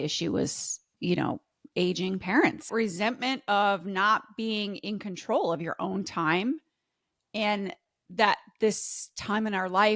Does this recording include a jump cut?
yes; 1 cut; at 2.7 s

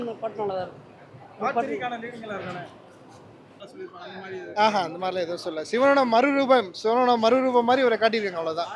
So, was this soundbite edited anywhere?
yes; 1 cut; at 3.6 s

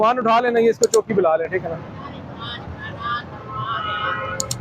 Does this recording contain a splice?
no; 0 cuts

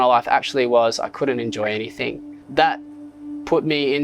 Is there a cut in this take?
yes; 1 cut; at 2.3 s

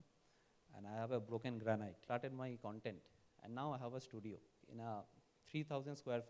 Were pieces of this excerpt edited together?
yes; 2 cuts; at 2.0 s, 4.6 s

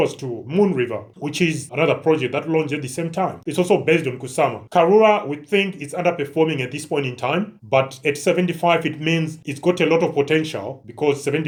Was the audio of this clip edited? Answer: no; 0 cuts

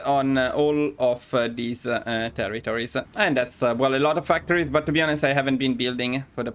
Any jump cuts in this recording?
yes; 1 cut; at 3.1 s

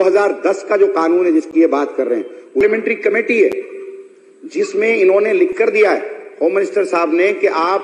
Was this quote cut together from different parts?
yes; 1 cut; at 2.6 s

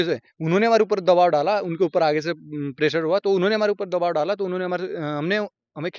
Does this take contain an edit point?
no; 0 cuts

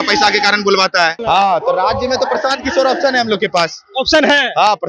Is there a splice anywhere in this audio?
yes; 1 cut; at 1.2 s

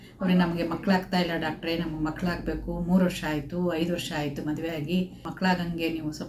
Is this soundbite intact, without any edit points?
no; 1 cut; at 5.2 s

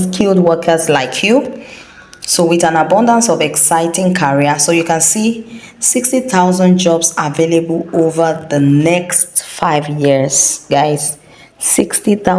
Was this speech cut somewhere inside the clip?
no; 0 cuts

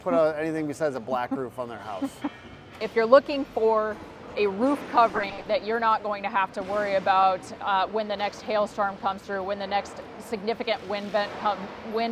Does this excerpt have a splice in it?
yes; 1 cut; at 2.8 s

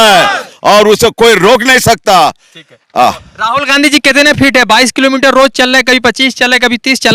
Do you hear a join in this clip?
no; 0 cuts

